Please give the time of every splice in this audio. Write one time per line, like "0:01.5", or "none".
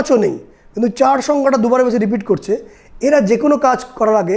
none